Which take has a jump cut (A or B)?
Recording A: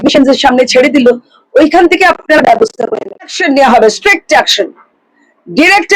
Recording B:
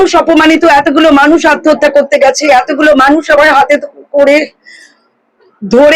A